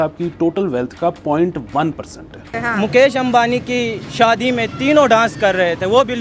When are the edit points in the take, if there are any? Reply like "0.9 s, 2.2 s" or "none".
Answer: 2.3 s